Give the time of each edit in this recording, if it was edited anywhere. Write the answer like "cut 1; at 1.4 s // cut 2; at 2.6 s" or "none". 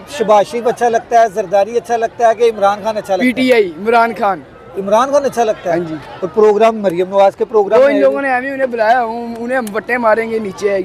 none